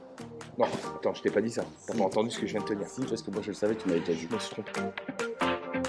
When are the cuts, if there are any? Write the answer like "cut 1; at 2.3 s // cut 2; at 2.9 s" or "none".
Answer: cut 1; at 4.6 s